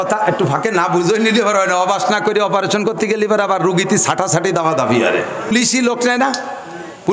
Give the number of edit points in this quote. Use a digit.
1